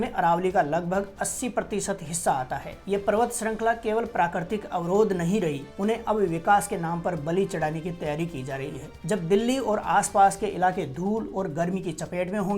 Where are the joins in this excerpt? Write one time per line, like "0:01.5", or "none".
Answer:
0:02.7
0:05.7
0:08.9